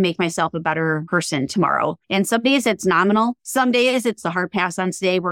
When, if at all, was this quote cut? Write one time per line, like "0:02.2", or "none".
0:01.0
0:02.0
0:03.4
0:04.2